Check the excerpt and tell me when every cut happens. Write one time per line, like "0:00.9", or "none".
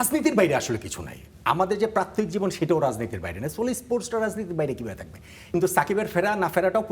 0:05.5